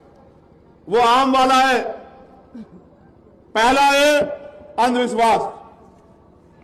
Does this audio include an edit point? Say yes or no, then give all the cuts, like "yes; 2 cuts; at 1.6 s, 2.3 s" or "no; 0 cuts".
no; 0 cuts